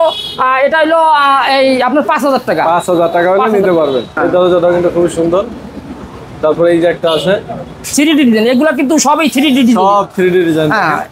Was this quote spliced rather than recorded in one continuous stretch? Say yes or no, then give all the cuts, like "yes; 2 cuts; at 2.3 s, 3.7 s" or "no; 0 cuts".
yes; 2 cuts; at 4.1 s, 7.9 s